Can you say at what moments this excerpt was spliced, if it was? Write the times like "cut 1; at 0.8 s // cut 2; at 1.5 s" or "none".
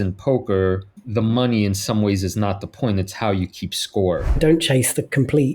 cut 1; at 0.9 s // cut 2; at 4.4 s